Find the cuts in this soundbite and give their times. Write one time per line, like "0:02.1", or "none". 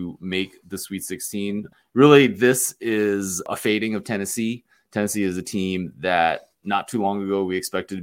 0:01.7
0:03.4